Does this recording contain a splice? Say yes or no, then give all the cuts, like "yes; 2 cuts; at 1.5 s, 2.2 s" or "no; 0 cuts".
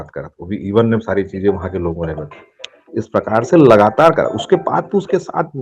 no; 0 cuts